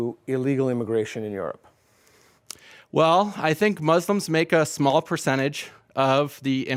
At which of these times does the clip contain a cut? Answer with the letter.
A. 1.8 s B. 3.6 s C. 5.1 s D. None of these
D